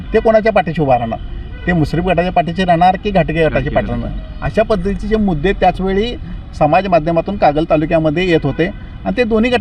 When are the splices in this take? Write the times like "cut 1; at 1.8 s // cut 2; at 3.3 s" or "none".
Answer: none